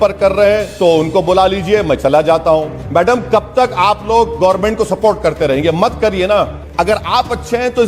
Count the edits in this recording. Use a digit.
2